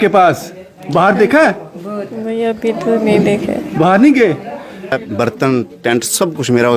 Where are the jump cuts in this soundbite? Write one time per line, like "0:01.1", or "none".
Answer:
0:05.0